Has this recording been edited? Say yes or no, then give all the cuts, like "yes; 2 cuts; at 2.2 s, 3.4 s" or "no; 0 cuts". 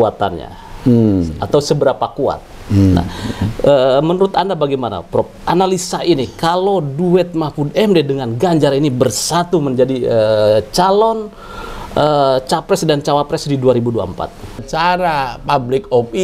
yes; 1 cut; at 14.6 s